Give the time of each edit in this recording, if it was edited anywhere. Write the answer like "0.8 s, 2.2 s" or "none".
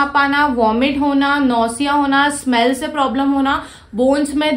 none